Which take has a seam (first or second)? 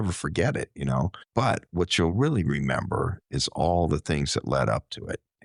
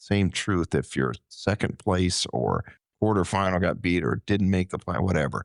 first